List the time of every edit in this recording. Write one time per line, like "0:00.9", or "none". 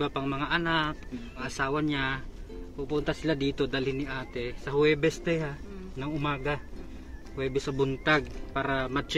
none